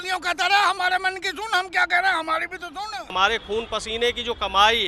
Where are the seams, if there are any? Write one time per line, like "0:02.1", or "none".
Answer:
0:03.1

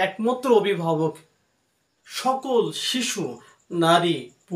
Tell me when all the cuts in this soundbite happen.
0:02.1

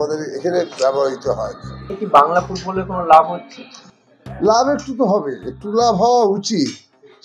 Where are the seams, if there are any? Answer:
0:01.9

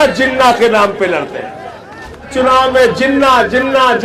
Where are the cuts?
0:02.3

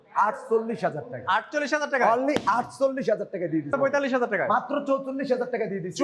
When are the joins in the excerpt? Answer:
0:03.7

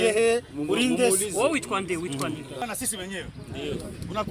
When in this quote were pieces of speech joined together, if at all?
0:02.6

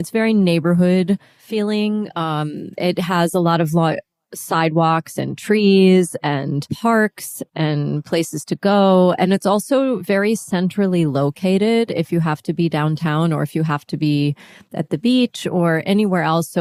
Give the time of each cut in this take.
none

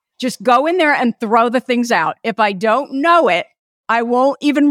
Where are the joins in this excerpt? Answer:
0:03.7

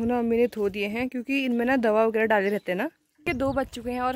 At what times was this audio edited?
0:03.3

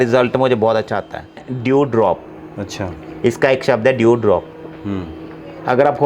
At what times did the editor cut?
0:01.5

